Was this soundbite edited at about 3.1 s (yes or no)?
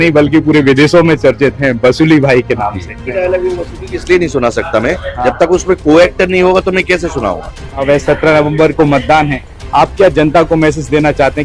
yes